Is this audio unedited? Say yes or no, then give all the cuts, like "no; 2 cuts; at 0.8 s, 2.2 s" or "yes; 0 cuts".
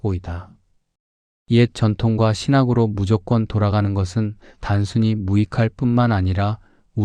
yes; 0 cuts